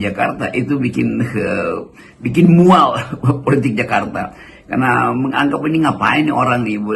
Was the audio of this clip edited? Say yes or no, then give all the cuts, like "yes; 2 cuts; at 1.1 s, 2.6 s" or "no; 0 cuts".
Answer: no; 0 cuts